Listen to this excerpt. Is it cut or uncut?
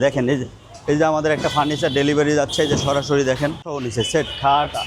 uncut